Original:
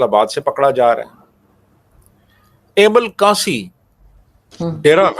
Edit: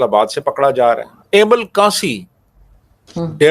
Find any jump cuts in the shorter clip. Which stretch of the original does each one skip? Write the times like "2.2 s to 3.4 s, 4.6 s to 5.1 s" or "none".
1.1 s to 2.6 s

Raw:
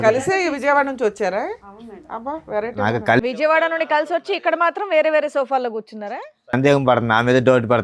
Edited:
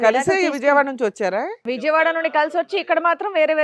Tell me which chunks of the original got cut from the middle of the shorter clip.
1.7 s to 3.2 s

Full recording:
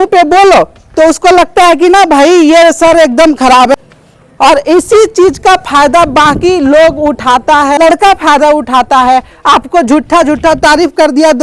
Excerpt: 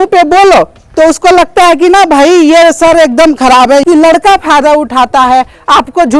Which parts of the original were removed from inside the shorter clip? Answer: 4.0 s to 7.8 s

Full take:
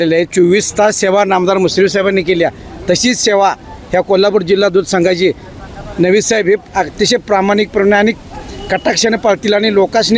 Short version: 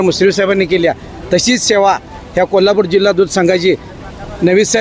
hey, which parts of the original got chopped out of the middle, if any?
none

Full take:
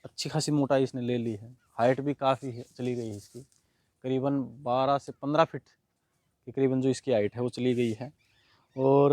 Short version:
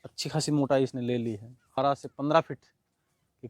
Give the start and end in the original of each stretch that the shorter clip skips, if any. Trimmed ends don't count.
1.8 s to 4.8 s

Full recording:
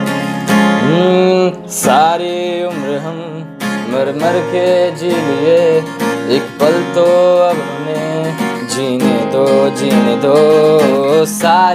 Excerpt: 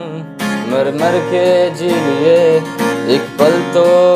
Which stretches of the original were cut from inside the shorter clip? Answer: none

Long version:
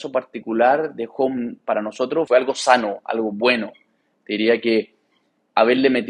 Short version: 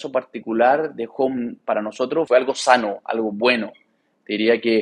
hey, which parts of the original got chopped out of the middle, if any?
none

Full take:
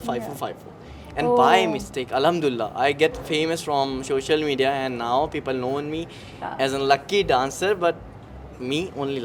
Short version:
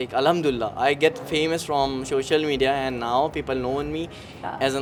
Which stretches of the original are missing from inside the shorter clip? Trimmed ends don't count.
none

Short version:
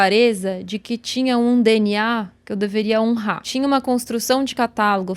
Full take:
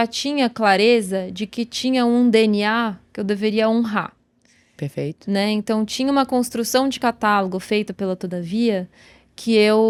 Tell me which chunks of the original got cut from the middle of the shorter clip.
4.2 s to 5.9 s

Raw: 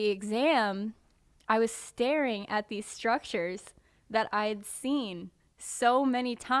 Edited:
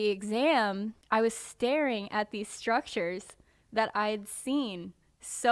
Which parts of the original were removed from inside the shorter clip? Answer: 0.9 s to 1.3 s

